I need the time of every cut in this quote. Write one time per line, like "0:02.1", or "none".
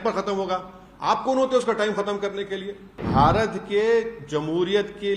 0:03.0